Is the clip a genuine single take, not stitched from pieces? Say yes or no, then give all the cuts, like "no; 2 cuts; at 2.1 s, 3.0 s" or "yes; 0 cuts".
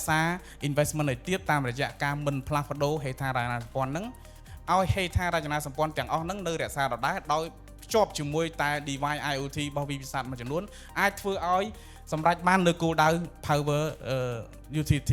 yes; 0 cuts